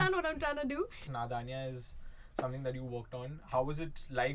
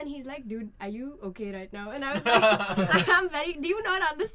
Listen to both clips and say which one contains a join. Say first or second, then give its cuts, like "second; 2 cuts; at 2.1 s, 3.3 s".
first; 1 cut; at 1.0 s